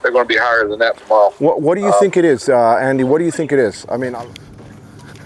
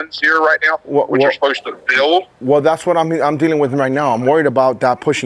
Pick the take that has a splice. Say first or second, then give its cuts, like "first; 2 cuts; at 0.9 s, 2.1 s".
first; 1 cut; at 4.1 s